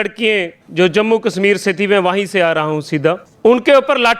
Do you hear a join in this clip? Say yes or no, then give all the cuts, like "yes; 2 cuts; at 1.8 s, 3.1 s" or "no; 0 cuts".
yes; 1 cut; at 3.3 s